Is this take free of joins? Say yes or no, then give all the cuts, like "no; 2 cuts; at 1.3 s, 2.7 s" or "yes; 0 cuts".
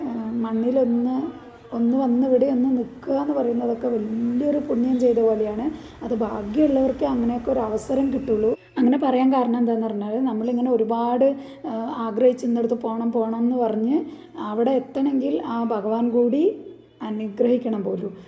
yes; 0 cuts